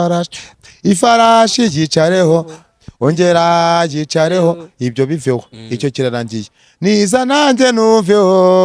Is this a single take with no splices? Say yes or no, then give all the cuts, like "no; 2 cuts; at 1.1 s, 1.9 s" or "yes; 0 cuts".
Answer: yes; 0 cuts